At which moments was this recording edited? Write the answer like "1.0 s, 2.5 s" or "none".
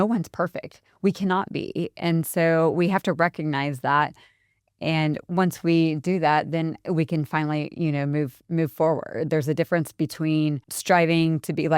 10.7 s

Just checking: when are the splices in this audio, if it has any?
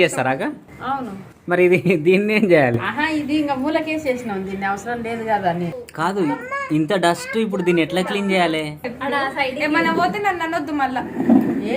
5.8 s, 8.8 s

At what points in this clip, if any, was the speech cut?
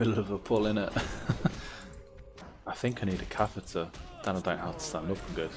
none

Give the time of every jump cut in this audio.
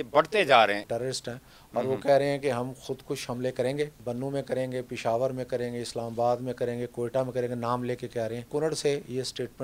0.8 s, 4.0 s, 8.5 s

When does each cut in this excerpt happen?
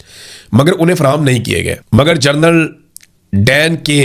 1.8 s

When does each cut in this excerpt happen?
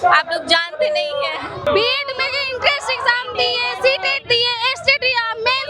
1.6 s

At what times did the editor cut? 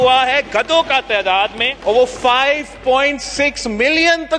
none

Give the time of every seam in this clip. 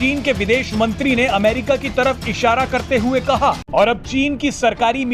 3.6 s

